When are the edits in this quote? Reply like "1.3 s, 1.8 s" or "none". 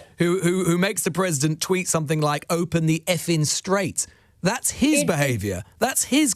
none